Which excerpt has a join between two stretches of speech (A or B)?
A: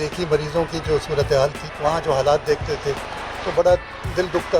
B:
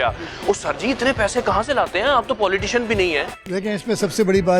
A